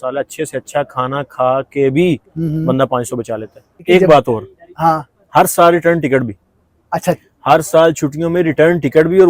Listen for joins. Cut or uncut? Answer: cut